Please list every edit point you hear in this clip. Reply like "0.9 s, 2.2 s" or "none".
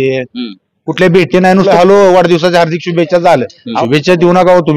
1.7 s, 3.6 s